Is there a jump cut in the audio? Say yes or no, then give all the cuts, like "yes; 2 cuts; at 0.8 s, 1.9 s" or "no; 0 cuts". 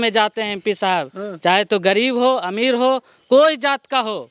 no; 0 cuts